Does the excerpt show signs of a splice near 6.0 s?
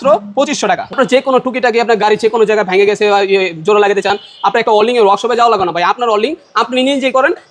no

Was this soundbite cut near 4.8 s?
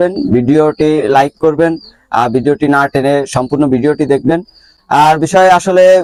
no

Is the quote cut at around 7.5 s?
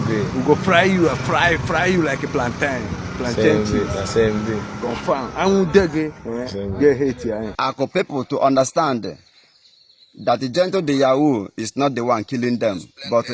yes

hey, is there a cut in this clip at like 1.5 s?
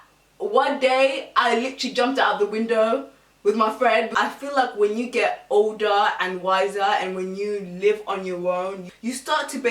no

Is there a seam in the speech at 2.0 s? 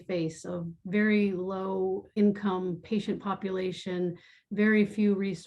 yes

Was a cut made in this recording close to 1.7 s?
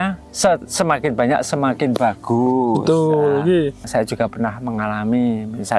no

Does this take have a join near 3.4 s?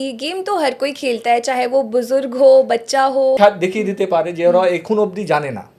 yes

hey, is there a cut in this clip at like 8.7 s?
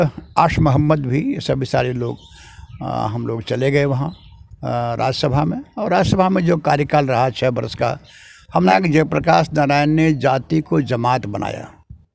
yes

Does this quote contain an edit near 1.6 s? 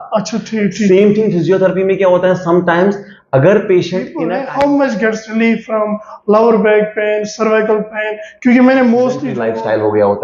no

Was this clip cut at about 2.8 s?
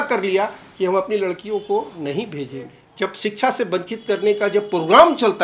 yes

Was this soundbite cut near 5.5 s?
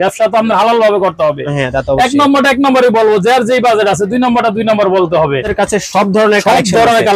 yes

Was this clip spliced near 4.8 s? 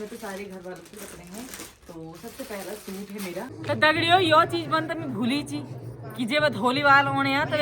no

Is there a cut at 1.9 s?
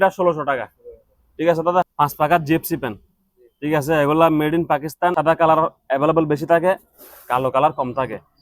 yes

